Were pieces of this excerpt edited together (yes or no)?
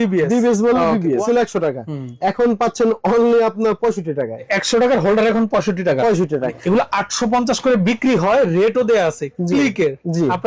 yes